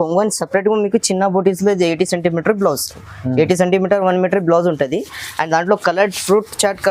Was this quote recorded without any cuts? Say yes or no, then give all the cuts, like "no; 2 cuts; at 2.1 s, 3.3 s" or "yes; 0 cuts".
yes; 0 cuts